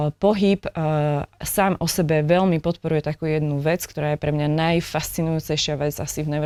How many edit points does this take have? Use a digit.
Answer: 0